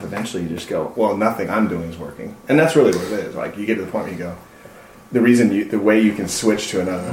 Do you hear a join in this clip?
yes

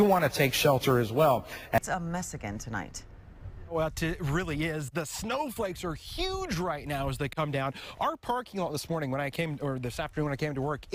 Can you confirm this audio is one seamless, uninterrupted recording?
yes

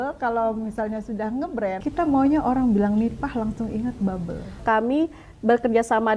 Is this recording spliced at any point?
yes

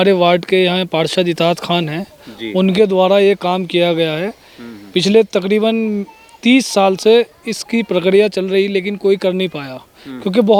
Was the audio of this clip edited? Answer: no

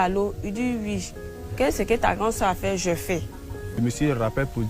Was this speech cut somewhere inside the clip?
yes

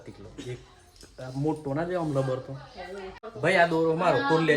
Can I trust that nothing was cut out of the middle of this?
no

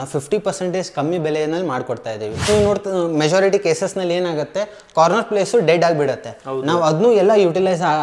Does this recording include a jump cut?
yes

